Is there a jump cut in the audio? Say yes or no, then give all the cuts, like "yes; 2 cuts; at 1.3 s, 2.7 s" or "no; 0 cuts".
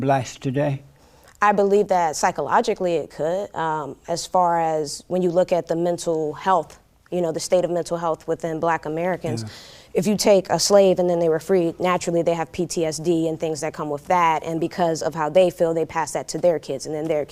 no; 0 cuts